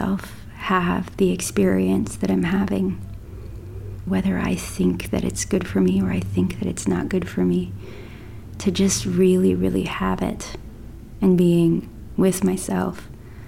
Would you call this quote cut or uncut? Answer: cut